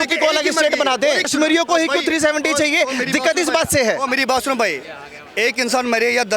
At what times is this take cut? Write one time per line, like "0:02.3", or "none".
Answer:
0:01.3